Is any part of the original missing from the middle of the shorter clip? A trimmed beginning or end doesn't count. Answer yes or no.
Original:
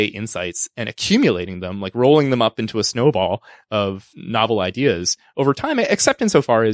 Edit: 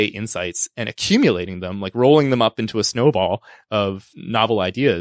no